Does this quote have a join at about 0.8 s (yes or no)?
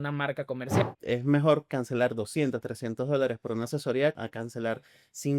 yes